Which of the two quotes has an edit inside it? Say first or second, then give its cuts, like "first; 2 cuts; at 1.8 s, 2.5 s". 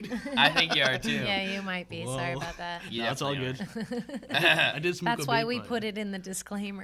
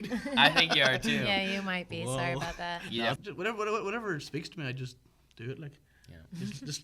second; 1 cut; at 3.2 s